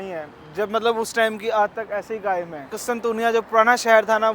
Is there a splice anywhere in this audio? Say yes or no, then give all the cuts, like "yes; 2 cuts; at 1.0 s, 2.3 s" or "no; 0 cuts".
yes; 1 cut; at 2.8 s